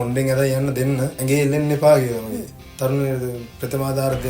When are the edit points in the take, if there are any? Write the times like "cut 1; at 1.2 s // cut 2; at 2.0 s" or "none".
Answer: cut 1; at 1.2 s // cut 2; at 2.6 s